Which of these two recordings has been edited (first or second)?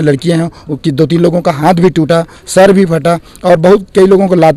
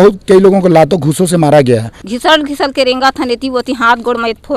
second